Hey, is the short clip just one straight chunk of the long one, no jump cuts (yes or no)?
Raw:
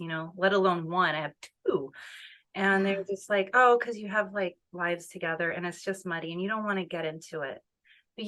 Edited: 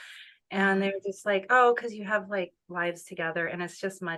yes